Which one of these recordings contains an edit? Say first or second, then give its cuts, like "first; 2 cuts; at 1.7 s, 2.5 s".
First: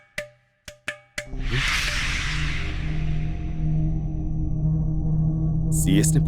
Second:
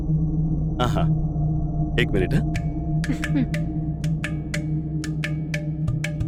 first; 1 cut; at 0.9 s